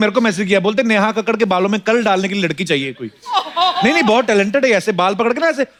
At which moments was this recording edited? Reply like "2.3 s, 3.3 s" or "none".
none